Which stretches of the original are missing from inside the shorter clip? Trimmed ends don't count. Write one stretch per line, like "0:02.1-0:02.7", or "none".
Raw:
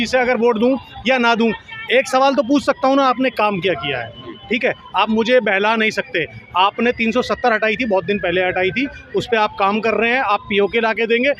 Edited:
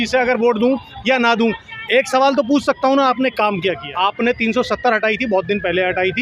0:03.9-0:06.4